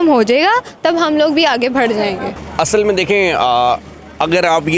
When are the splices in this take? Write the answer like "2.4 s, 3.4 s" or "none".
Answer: none